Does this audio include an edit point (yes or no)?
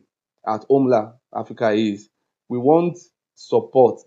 no